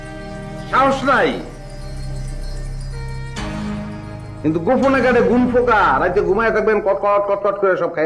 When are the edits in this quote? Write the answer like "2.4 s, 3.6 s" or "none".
none